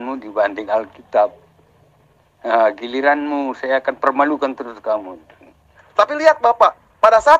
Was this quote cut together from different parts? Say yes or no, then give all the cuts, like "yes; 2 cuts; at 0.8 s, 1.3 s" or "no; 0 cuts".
yes; 1 cut; at 5.8 s